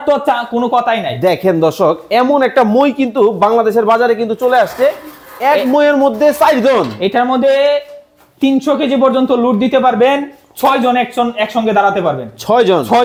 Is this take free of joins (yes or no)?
yes